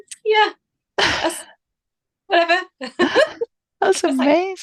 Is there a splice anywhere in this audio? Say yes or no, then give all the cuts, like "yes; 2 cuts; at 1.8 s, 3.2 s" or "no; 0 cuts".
no; 0 cuts